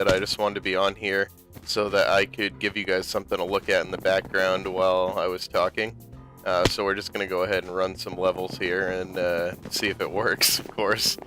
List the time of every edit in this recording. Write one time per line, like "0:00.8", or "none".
0:09.6